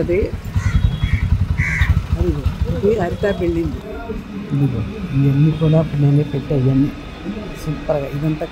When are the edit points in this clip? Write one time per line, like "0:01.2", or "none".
0:03.8